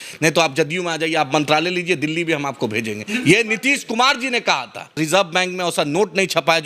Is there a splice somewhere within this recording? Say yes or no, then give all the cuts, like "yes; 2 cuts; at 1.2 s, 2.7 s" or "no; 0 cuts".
yes; 1 cut; at 4.9 s